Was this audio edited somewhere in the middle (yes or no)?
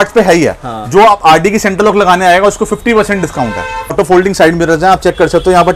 yes